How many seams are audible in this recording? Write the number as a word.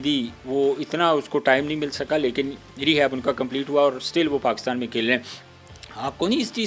zero